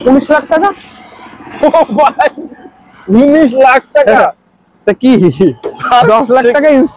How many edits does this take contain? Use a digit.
0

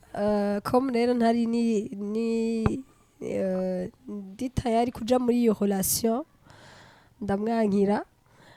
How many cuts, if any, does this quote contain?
0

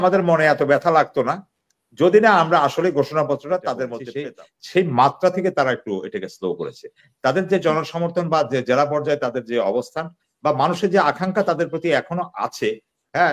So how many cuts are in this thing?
1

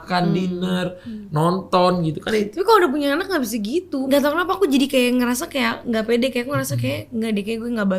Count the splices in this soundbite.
1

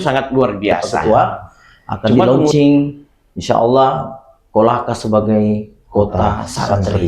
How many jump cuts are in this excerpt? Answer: 1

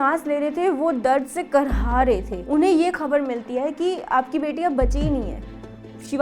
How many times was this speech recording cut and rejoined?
1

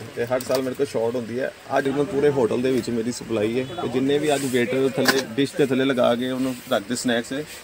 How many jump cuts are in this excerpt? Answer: 1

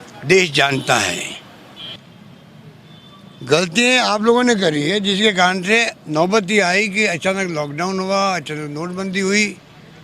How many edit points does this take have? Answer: 1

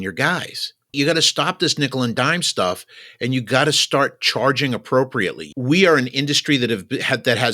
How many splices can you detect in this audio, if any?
2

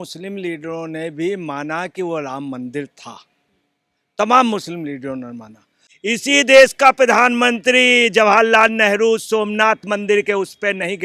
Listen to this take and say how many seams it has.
1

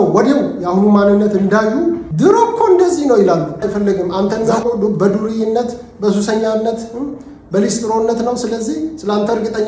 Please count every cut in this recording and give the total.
2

